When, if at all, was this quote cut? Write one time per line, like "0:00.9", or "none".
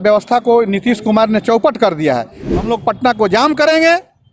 0:02.4